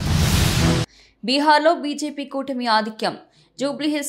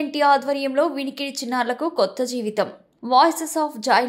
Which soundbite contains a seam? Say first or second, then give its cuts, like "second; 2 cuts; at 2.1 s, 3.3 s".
first; 1 cut; at 1.0 s